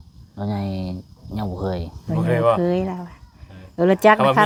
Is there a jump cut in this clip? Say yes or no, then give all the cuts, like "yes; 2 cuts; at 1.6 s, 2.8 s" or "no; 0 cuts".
no; 0 cuts